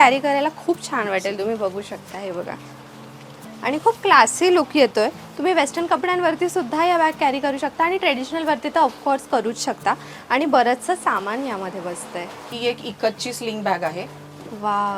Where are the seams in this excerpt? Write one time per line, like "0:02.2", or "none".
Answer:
none